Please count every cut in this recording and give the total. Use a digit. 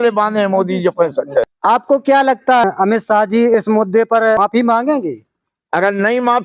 3